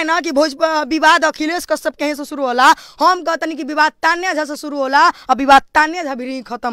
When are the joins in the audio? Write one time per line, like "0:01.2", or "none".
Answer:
none